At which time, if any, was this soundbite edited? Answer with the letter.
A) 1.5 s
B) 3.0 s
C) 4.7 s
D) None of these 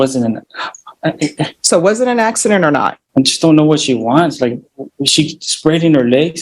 B